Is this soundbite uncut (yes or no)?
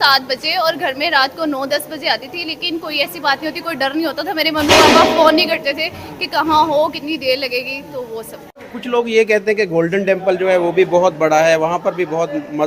no